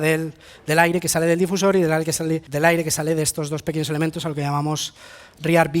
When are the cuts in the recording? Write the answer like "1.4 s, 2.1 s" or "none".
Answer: 2.5 s